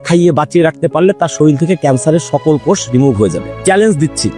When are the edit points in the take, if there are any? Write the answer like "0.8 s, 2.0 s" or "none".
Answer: none